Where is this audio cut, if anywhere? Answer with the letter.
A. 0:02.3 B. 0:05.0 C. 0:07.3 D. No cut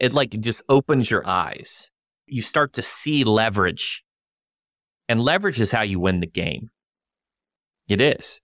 A